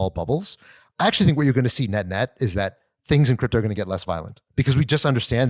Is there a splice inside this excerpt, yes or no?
yes